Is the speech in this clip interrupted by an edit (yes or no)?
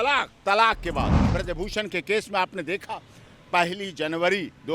yes